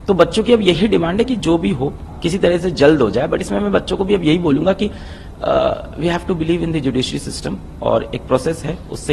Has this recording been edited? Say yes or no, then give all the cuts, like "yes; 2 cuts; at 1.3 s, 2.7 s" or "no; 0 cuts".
no; 0 cuts